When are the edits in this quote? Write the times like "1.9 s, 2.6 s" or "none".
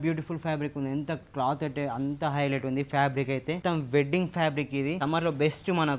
3.6 s, 5.0 s